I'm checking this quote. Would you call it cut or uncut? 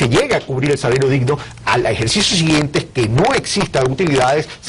cut